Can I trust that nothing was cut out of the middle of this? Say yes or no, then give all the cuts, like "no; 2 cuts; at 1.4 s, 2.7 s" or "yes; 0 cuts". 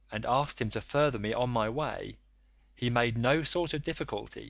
yes; 0 cuts